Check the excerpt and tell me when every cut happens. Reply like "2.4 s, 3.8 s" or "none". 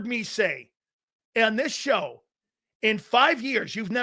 none